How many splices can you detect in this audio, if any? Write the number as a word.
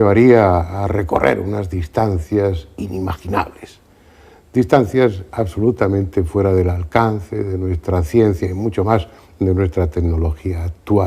one